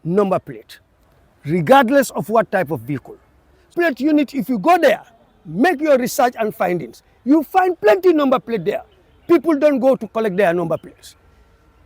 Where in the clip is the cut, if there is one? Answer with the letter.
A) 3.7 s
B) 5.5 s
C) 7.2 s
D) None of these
A